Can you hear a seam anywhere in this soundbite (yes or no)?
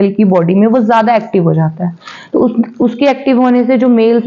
no